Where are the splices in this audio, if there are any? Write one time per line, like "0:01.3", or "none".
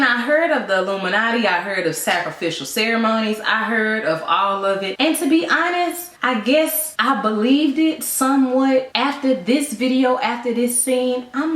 0:08.9